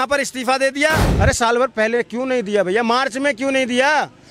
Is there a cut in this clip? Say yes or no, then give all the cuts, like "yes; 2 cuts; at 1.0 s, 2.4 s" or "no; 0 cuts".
yes; 1 cut; at 1.1 s